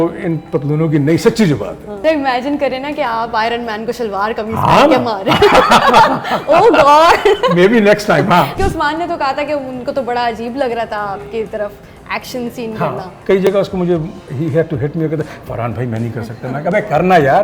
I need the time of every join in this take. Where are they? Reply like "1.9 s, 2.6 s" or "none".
2.0 s, 8.5 s, 13.1 s

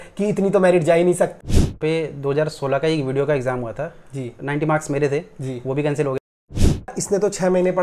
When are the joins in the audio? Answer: 1.4 s, 6.9 s

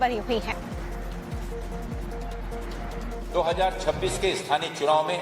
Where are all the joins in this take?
1.4 s

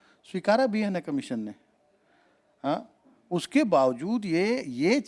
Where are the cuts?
none

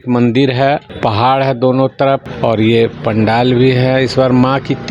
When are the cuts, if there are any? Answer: 0.9 s, 2.3 s

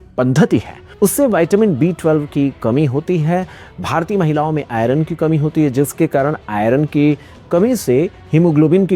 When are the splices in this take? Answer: none

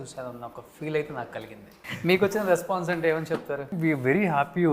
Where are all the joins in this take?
1.9 s, 3.7 s

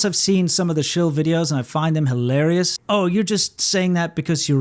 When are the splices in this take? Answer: 2.8 s

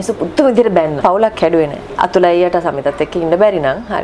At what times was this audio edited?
1.0 s, 1.8 s

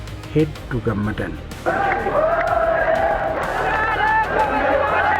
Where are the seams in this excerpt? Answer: 1.7 s

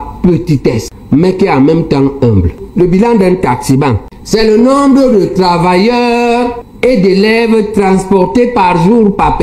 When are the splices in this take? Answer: 0.9 s, 2.6 s

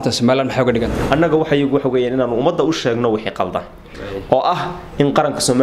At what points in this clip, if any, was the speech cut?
1.0 s

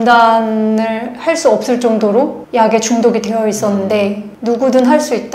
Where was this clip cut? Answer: none

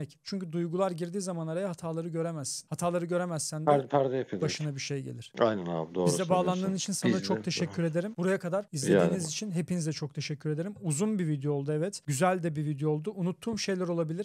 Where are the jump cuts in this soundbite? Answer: none

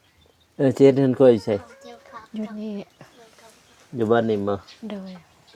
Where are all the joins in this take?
none

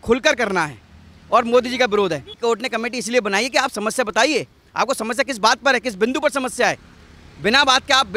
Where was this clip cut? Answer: 2.3 s

